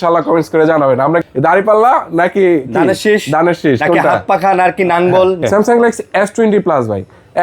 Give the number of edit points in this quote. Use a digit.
2